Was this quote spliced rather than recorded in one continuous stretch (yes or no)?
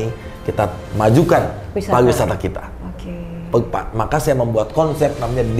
no